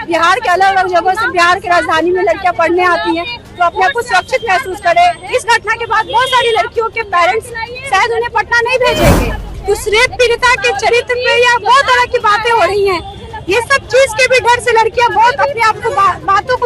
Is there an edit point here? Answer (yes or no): yes